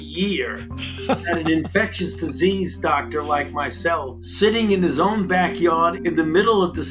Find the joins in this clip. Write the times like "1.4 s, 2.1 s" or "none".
4.2 s, 6.0 s